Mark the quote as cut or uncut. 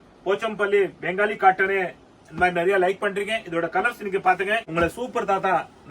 cut